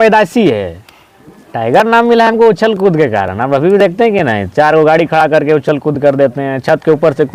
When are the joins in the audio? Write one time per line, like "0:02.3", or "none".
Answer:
none